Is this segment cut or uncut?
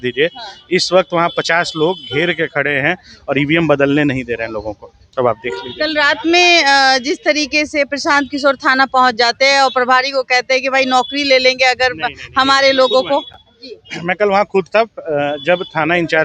uncut